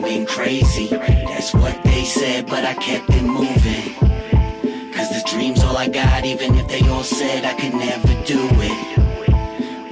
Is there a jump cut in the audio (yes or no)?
no